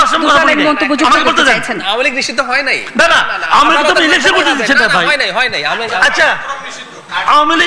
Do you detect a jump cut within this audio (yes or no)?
no